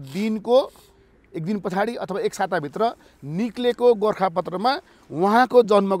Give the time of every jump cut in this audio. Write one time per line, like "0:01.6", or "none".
none